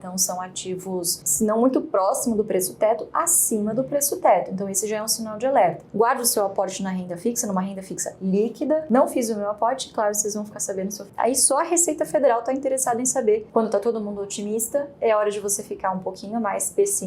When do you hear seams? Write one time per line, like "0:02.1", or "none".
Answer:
0:01.2
0:05.8
0:08.8
0:11.1
0:13.5